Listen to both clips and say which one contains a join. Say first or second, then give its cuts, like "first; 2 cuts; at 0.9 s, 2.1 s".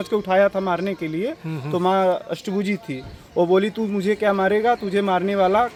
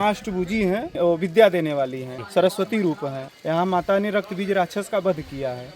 second; 3 cuts; at 0.9 s, 2.2 s, 3.2 s